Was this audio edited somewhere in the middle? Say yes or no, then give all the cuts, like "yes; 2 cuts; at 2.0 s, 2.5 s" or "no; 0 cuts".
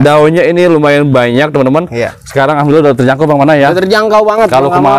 yes; 1 cut; at 2.2 s